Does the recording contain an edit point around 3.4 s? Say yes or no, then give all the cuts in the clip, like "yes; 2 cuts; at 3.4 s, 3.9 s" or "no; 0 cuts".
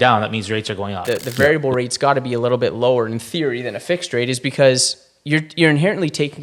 no; 1 cut; at 1.0 s